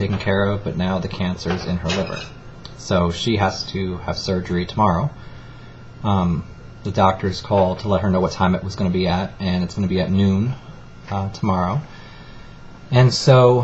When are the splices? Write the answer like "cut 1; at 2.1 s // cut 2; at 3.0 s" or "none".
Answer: cut 1; at 9.9 s